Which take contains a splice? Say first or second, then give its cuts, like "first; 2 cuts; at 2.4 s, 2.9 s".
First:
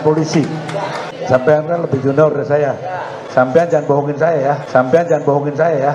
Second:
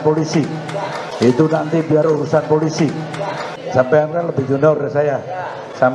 first; 1 cut; at 1.1 s